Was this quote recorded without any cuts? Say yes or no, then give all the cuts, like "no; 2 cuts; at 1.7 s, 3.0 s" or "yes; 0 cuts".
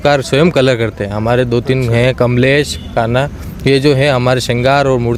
yes; 0 cuts